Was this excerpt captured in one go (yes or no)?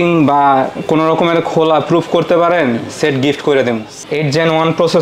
no